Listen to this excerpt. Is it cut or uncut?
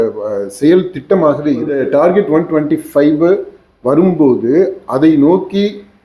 cut